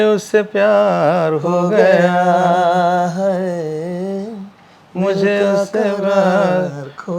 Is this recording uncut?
yes; 0 cuts

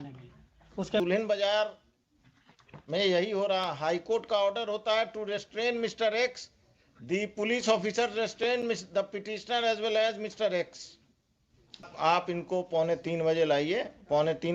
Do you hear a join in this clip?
yes; 2 cuts; at 1.0 s, 11.9 s

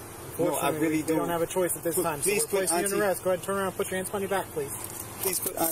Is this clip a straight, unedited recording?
yes; 0 cuts

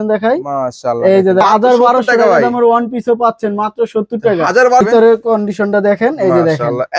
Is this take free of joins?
no; 2 cuts; at 1.4 s, 4.8 s

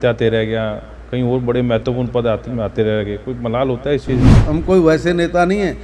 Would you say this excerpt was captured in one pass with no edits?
no; 1 cut; at 4.4 s

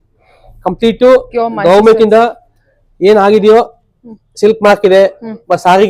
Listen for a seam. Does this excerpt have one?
no; 0 cuts

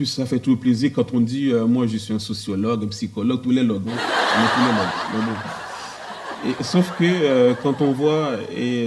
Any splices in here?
no; 0 cuts

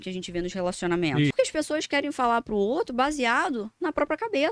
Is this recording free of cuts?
no; 1 cut; at 1.3 s

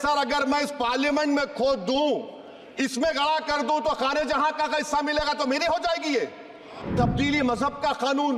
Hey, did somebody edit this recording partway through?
yes; 1 cut; at 6.8 s

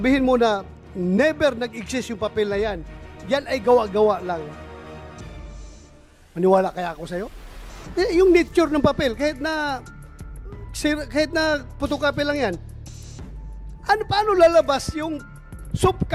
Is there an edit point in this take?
no; 0 cuts

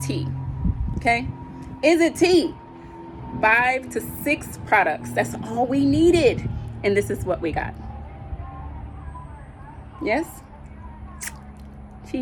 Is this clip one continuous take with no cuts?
yes; 0 cuts

